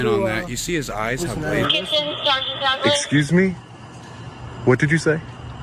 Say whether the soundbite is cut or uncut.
cut